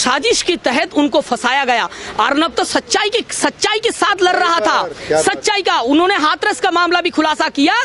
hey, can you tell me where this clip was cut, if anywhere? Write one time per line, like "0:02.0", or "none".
none